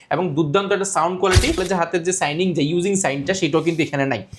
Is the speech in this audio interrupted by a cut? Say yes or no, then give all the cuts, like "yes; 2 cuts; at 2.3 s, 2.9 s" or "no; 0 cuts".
yes; 1 cut; at 1.6 s